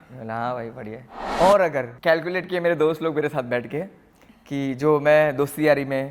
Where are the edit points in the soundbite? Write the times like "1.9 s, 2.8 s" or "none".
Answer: 1.2 s, 1.9 s